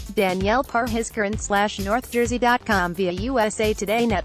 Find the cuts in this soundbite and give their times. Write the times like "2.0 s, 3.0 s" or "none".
none